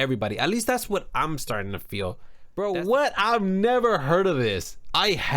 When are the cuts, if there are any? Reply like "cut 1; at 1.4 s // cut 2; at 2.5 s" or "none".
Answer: cut 1; at 2.3 s